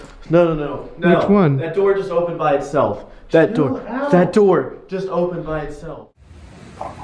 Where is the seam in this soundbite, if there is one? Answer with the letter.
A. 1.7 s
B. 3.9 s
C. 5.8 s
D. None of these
C